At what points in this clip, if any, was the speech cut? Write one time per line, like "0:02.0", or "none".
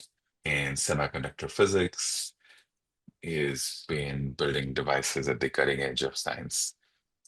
0:03.1